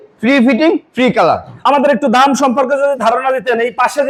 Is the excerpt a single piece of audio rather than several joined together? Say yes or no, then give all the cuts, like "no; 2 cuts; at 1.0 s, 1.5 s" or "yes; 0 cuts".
yes; 0 cuts